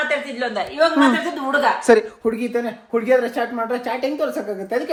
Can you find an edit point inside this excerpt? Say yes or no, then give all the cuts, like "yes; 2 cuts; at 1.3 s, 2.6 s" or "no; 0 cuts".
no; 0 cuts